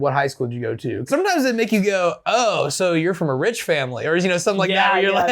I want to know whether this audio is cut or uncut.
cut